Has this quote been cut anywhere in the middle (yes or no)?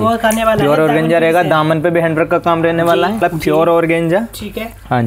yes